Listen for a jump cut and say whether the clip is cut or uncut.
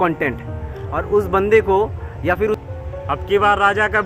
cut